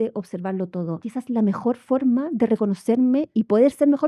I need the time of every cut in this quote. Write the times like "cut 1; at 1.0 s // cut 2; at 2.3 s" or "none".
cut 1; at 1.0 s